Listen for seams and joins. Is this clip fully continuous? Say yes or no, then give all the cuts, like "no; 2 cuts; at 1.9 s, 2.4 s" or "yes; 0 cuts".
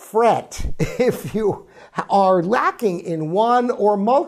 yes; 0 cuts